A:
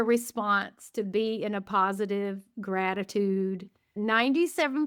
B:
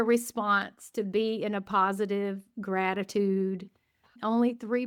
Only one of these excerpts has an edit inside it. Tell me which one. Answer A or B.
A